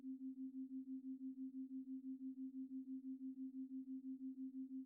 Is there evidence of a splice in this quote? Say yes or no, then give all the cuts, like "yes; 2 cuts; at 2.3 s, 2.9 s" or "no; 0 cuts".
no; 0 cuts